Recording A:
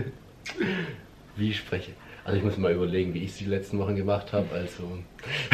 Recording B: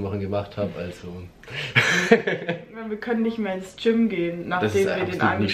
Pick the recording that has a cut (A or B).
B